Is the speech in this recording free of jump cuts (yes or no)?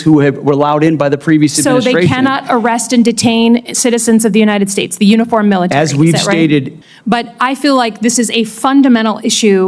no